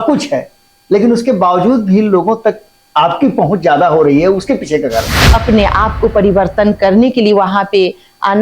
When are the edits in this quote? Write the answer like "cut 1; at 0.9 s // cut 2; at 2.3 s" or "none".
cut 1; at 5.2 s